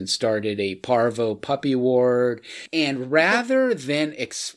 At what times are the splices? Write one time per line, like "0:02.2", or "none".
0:02.6